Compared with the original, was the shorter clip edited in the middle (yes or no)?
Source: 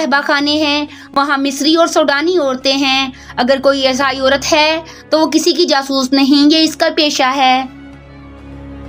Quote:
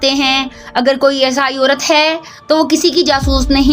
no